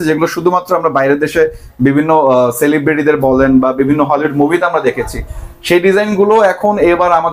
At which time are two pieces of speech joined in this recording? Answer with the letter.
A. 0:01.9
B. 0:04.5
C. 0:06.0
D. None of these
D